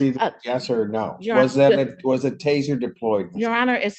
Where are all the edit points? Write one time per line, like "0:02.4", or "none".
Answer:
none